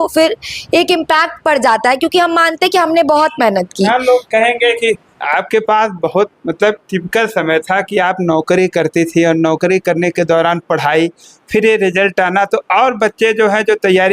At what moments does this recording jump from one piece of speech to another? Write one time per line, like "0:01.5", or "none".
0:05.2